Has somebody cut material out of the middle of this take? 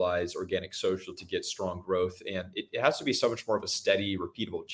no; 0 cuts

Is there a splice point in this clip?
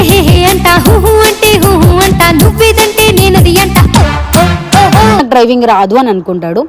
yes; 1 cut; at 5.2 s

